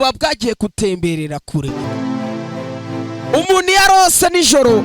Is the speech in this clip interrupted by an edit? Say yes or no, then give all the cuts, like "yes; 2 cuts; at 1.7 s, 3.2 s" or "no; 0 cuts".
yes; 1 cut; at 1.8 s